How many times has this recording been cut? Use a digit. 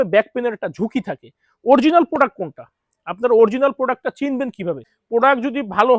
1